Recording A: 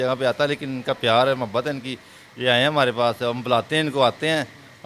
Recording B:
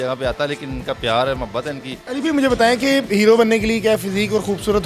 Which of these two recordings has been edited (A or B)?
B